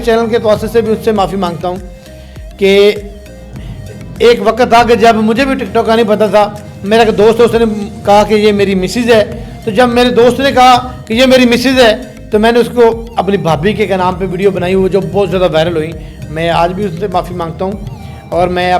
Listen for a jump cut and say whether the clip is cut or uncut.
uncut